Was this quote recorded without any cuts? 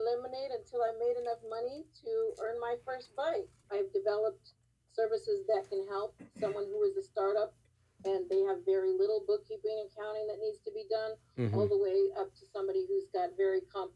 no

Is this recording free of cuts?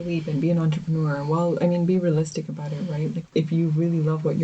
no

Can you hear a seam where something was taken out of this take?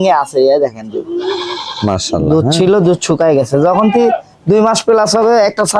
no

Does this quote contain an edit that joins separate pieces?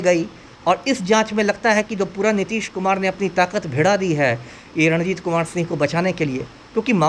no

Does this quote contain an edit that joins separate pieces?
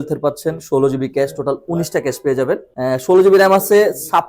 yes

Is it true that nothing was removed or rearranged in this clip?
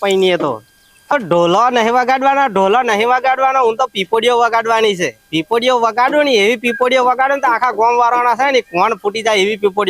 no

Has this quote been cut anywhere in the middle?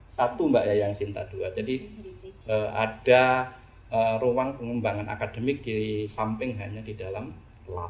no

